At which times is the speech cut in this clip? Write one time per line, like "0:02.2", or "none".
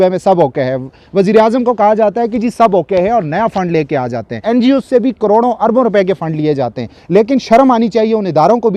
0:04.4